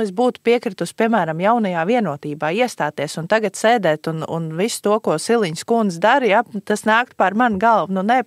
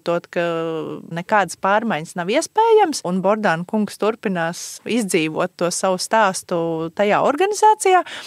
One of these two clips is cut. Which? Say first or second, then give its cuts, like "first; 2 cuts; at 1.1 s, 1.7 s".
second; 3 cuts; at 1.2 s, 3.1 s, 4.8 s